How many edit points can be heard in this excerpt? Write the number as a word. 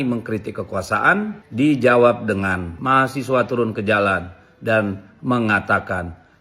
two